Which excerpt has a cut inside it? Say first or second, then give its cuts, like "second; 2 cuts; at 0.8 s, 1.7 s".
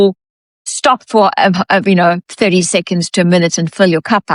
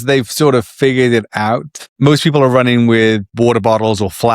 second; 2 cuts; at 1.8 s, 3.3 s